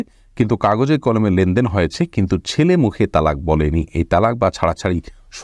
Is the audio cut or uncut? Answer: uncut